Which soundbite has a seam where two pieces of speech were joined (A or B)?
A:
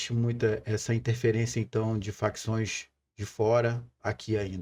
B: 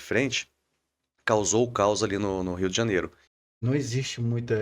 B